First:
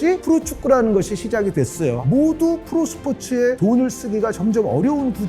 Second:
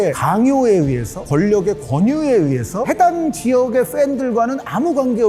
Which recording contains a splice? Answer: first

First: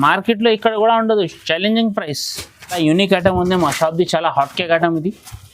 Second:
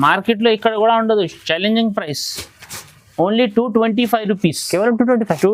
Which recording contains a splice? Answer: first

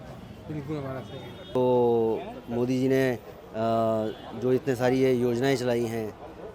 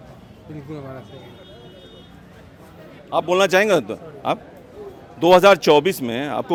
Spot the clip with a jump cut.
first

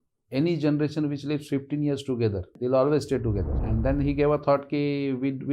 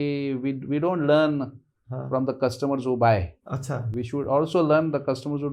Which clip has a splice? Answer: first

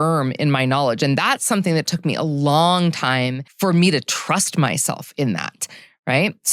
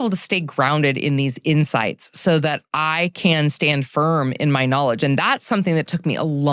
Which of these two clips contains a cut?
first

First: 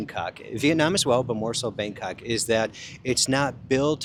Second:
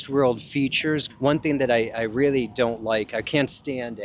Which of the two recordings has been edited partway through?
second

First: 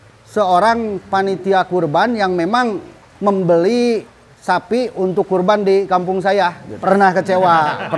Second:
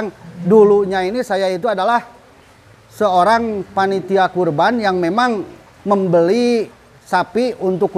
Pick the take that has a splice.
first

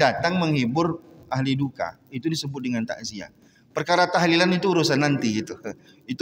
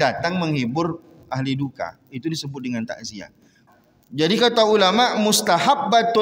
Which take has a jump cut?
second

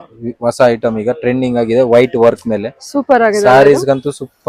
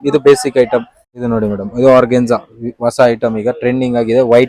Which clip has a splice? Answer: second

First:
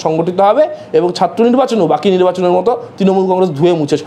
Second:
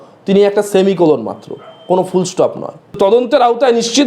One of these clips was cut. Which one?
second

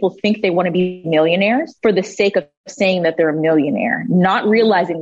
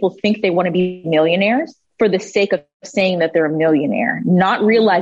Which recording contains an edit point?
first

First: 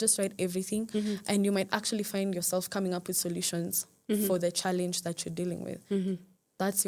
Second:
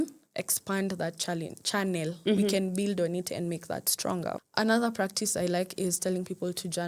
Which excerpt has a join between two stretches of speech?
second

